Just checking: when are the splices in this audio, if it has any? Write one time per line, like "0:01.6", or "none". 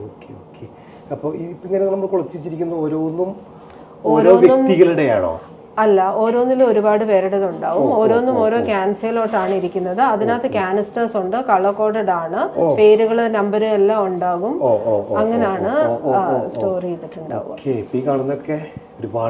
none